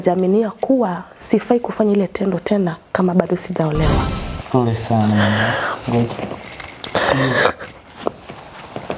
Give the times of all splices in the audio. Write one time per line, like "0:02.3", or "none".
0:04.1